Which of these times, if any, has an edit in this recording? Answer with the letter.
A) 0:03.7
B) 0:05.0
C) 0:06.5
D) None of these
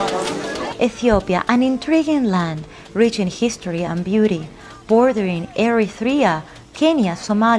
D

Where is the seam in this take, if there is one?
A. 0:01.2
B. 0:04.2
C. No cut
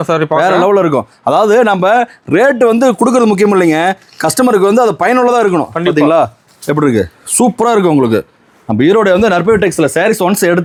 C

